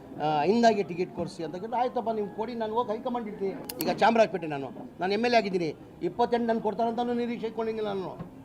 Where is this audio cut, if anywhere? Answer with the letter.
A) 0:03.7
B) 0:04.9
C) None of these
A